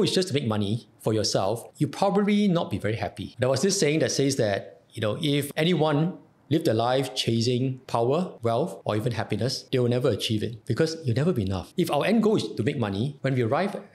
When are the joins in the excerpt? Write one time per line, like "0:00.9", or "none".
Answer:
none